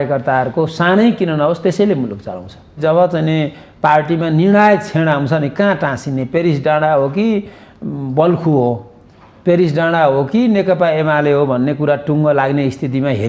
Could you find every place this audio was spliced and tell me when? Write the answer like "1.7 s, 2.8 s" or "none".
2.7 s